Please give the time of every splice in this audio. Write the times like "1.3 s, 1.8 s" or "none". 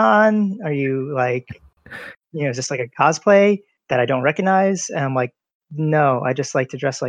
3.7 s

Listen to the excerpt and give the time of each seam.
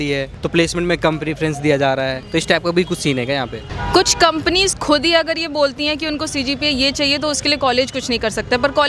none

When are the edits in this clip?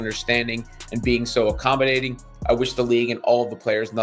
none

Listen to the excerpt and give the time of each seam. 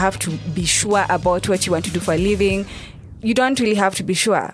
none

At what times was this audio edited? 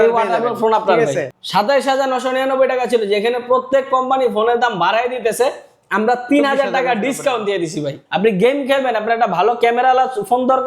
1.4 s, 8.0 s

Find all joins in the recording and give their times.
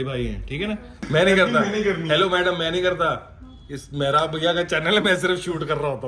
1.0 s

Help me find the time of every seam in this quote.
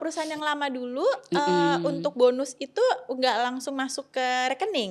none

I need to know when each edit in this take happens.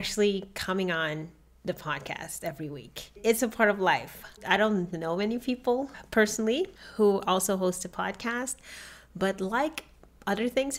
3.0 s, 6.8 s

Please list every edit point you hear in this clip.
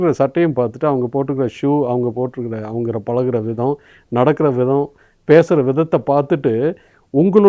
none

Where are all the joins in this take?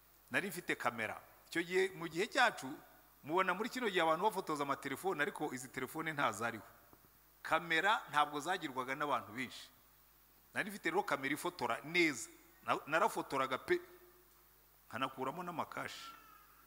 none

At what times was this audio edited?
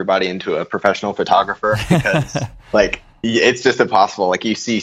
none

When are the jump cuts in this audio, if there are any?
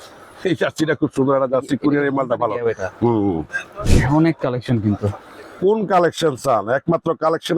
3.9 s

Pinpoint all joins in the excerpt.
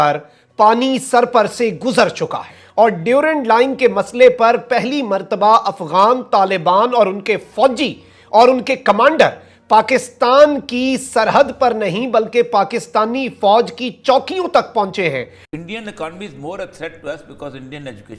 2.5 s, 15.4 s

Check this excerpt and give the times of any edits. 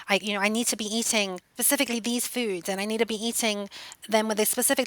1.5 s

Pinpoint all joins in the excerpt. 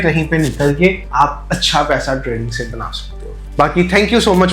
none

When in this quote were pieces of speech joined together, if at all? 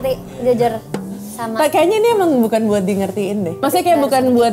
3.6 s

